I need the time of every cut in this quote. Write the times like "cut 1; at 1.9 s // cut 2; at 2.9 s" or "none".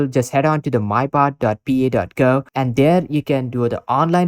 none